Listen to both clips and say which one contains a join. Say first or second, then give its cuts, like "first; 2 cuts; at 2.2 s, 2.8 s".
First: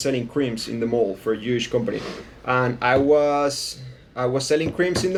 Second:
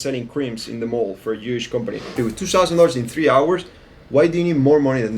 second; 1 cut; at 2.2 s